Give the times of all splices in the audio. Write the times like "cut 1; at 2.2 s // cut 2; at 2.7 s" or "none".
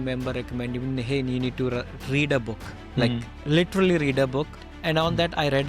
cut 1; at 4.6 s